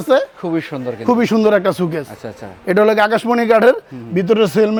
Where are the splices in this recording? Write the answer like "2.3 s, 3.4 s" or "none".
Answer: none